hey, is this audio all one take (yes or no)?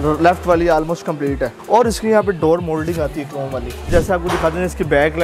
no